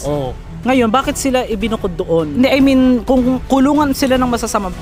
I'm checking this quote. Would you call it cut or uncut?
uncut